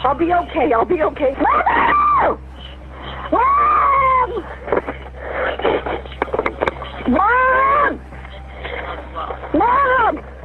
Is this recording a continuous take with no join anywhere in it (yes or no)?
no